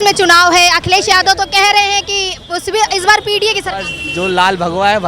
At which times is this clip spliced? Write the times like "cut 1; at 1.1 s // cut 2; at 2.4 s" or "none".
none